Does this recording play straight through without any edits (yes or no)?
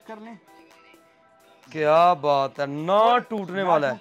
yes